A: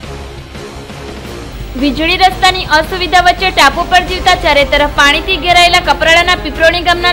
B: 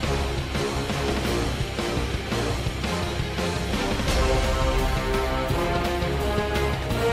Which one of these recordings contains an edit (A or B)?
A